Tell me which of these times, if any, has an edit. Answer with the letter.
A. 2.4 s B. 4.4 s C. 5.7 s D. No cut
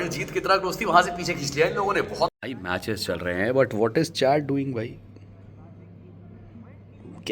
A